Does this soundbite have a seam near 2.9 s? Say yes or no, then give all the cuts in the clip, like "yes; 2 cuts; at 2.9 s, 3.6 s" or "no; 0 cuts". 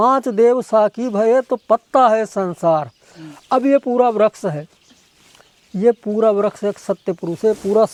no; 0 cuts